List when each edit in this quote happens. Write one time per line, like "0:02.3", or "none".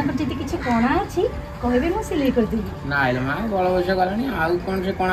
none

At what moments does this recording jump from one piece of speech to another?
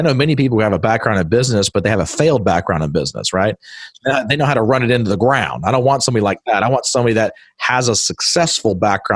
none

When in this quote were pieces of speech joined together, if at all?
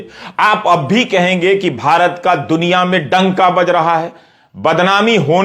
none

